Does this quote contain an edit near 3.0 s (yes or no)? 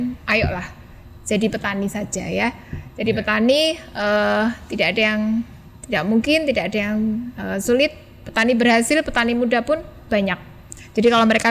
no